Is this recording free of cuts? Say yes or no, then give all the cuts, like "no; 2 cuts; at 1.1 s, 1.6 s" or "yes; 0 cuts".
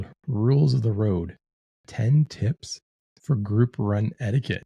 yes; 0 cuts